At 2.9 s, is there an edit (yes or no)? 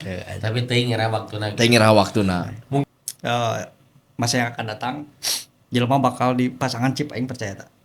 yes